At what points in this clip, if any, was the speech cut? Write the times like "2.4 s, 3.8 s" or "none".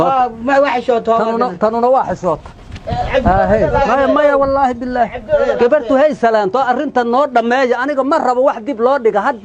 none